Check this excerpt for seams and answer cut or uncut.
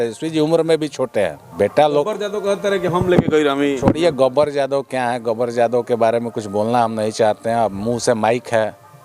cut